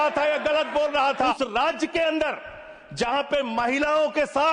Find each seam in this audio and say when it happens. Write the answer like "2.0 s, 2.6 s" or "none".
1.3 s

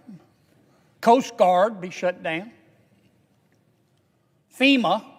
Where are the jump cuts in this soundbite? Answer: none

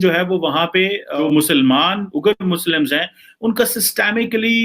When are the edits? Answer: 1.1 s

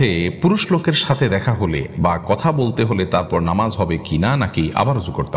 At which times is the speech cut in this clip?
none

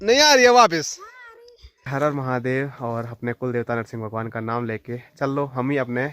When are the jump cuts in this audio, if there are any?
1.9 s

